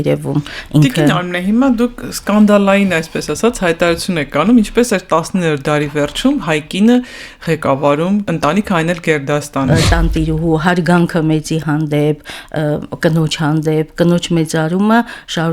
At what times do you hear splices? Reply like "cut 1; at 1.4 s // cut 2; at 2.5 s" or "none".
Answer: cut 1; at 9.7 s

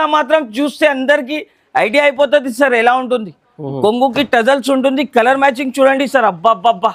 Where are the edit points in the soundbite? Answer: none

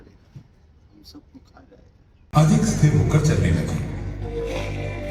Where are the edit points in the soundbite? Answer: cut 1; at 2.1 s

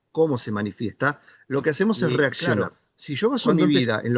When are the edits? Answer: cut 1; at 2.6 s

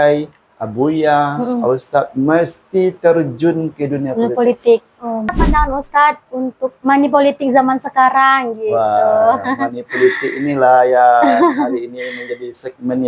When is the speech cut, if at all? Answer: cut 1; at 5.3 s

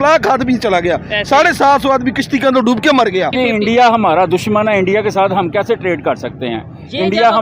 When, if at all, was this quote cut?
cut 1; at 3.3 s

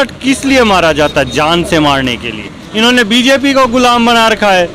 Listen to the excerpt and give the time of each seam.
cut 1; at 2.6 s

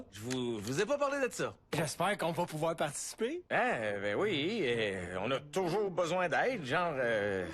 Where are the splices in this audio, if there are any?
cut 1; at 4.1 s

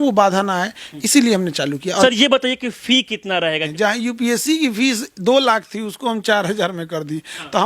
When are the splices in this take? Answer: cut 1; at 2.0 s // cut 2; at 3.7 s

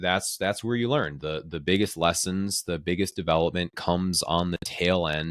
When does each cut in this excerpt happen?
none

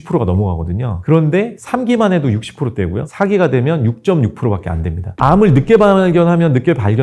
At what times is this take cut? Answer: none

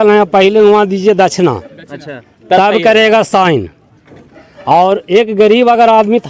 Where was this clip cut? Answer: none

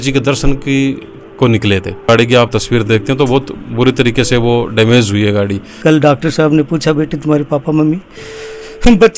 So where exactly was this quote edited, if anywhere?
cut 1; at 2.1 s // cut 2; at 5.7 s

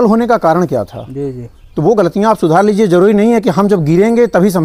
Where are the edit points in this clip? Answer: none

